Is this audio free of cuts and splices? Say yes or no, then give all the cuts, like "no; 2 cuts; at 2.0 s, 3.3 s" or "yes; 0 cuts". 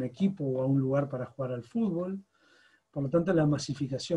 yes; 0 cuts